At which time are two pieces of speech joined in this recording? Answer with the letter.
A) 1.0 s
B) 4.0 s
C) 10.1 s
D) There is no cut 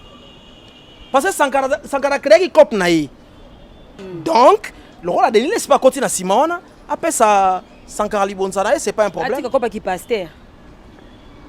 B